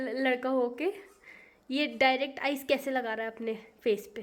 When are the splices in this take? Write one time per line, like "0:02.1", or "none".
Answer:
none